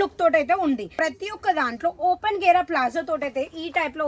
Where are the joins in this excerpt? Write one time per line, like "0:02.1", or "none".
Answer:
0:00.9